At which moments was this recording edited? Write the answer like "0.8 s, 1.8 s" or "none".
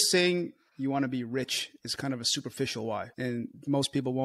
3.2 s